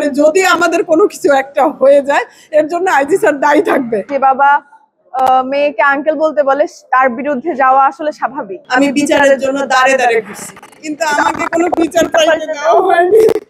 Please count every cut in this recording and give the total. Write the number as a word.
two